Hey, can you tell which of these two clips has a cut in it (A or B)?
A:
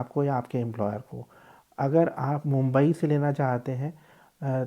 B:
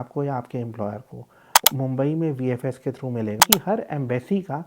B